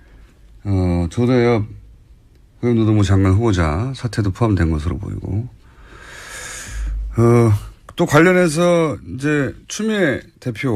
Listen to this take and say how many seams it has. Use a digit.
1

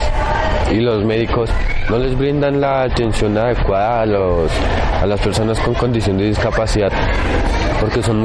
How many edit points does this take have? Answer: 0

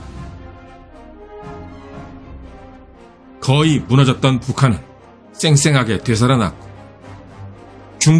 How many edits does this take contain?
1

